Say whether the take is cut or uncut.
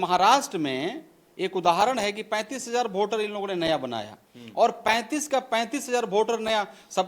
uncut